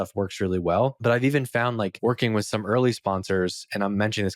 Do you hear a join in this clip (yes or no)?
yes